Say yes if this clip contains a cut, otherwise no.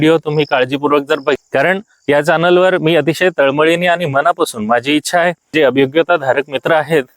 yes